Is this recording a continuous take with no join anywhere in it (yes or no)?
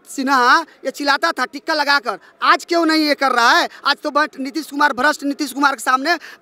yes